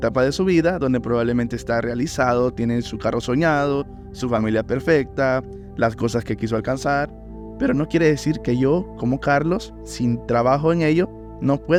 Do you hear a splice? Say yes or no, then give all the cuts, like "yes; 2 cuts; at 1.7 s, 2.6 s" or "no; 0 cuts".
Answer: no; 0 cuts